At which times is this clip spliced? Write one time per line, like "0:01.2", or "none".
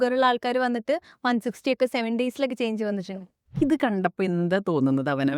0:03.1